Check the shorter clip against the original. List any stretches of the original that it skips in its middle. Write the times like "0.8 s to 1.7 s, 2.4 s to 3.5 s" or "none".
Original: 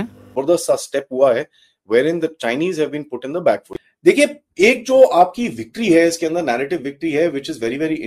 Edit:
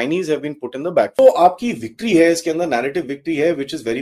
3.6 s to 4.9 s